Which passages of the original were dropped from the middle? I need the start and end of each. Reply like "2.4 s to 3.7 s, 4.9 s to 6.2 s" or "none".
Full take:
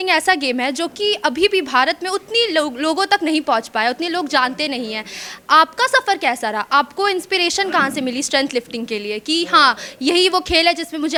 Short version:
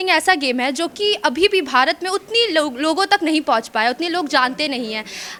none